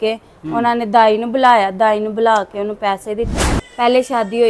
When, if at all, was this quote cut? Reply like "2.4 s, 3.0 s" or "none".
3.4 s